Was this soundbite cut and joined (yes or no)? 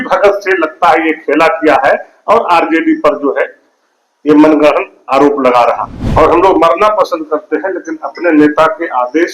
yes